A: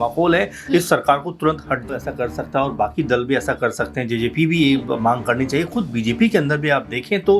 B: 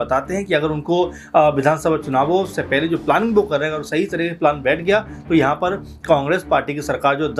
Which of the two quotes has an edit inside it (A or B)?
A